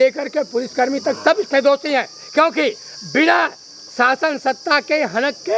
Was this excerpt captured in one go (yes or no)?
yes